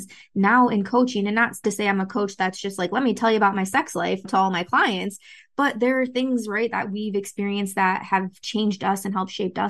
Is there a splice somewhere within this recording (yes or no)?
no